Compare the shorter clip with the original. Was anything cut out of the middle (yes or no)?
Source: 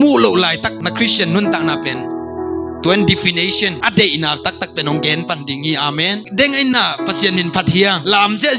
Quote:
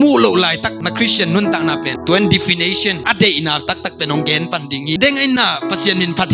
yes